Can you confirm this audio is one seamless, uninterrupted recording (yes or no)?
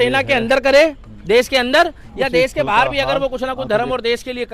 yes